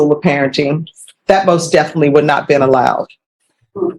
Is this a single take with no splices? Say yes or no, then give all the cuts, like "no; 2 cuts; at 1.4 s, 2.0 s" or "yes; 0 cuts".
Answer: yes; 0 cuts